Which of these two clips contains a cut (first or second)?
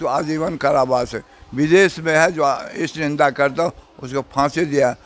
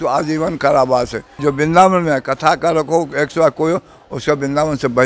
second